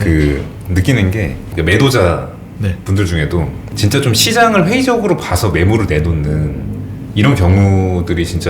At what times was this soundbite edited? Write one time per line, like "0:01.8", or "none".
0:01.4
0:03.7